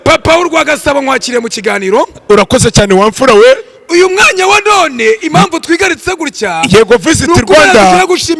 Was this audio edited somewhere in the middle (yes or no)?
no